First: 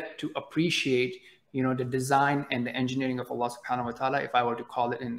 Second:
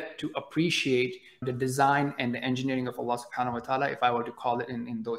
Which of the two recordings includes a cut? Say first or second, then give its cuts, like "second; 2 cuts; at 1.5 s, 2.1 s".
second; 1 cut; at 1.5 s